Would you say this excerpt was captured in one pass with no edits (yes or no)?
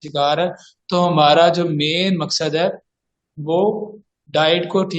yes